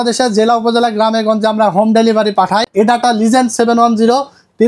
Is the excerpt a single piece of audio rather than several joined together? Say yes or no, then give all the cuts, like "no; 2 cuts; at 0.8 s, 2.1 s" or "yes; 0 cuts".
no; 1 cut; at 2.7 s